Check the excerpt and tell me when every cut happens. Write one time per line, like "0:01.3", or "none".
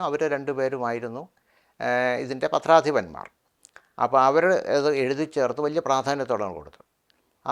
none